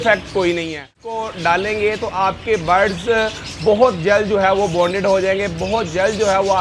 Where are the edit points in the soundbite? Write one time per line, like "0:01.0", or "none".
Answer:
0:00.9